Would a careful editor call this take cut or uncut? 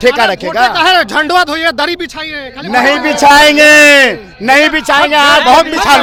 uncut